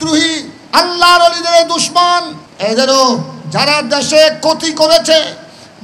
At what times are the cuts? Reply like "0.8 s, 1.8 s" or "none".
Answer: 2.4 s